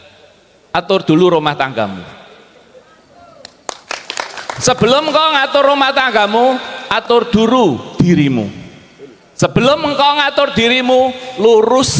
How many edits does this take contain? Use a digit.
0